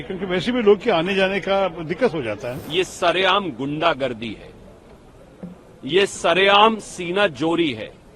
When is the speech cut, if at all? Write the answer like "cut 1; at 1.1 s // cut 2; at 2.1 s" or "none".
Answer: cut 1; at 2.5 s